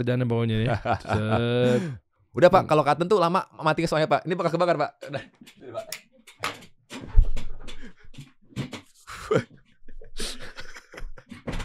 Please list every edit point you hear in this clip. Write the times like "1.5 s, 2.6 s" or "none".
none